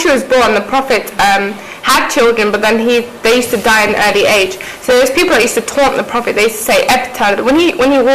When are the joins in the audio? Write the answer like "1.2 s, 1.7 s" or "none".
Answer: none